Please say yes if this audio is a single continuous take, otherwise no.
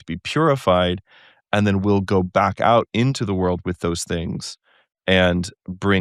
yes